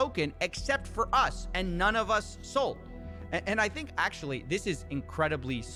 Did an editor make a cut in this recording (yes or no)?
no